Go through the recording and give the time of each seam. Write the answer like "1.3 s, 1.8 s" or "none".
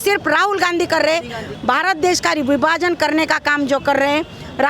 1.4 s